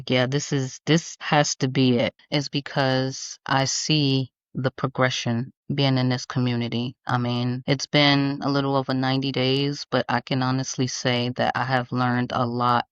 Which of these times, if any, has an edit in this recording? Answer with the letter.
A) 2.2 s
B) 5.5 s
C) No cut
A